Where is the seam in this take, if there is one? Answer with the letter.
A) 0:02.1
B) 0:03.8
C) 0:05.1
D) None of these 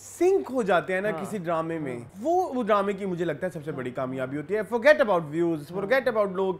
A